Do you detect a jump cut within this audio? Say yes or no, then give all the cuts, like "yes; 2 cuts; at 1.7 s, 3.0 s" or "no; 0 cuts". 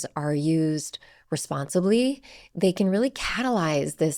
no; 0 cuts